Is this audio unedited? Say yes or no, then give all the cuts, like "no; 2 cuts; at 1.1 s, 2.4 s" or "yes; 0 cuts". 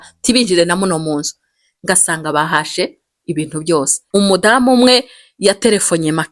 no; 1 cut; at 4.0 s